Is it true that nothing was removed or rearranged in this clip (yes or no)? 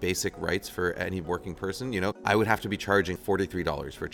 no